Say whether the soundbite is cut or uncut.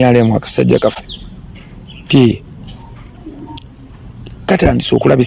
uncut